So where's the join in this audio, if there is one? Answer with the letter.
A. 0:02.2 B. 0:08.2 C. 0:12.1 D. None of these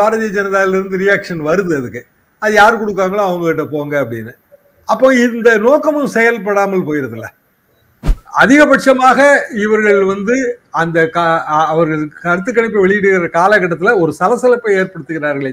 B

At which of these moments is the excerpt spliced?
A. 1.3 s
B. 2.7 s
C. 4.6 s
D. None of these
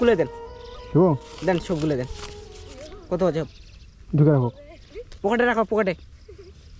D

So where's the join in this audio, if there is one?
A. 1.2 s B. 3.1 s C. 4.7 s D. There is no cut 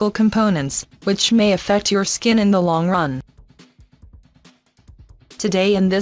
C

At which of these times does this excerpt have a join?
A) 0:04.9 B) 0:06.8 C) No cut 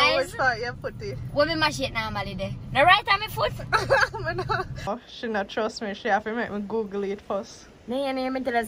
A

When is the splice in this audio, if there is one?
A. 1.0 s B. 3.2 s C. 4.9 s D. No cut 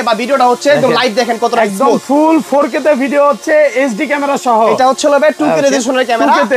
D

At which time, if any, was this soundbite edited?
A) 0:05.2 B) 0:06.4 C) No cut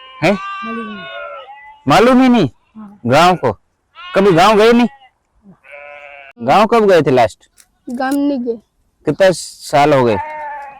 B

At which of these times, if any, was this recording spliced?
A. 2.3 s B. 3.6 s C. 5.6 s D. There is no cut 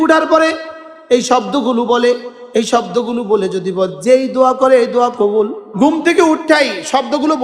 C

